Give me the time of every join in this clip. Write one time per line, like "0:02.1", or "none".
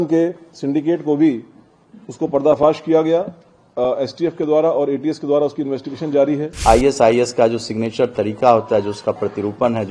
0:06.6

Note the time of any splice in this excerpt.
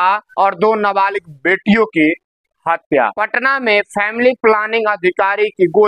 0:03.2

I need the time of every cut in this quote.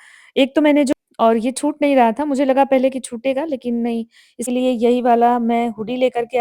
0:00.9
0:04.4

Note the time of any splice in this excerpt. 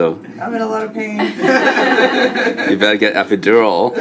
none

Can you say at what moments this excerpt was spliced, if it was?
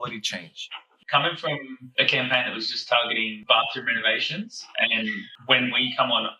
0:00.9
0:01.8
0:03.3

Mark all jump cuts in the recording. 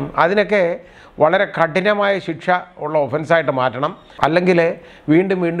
0:04.0

